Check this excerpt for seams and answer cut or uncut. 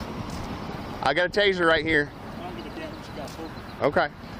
uncut